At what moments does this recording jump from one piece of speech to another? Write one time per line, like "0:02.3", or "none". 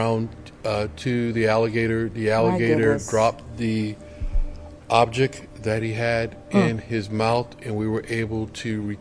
none